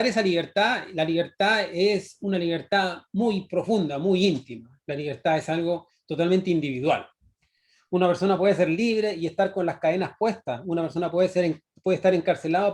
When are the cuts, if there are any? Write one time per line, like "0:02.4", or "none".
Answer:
none